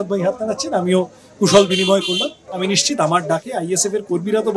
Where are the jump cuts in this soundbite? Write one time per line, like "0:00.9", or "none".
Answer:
0:02.4